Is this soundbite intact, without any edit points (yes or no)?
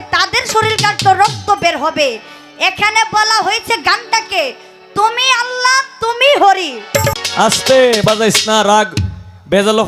no